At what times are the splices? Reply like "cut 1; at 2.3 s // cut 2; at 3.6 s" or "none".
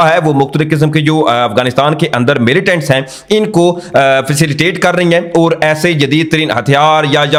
none